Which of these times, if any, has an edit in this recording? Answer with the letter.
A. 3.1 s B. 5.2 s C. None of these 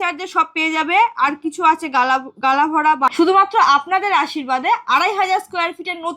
A